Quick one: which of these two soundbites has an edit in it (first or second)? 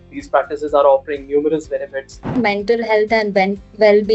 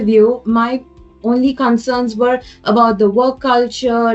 first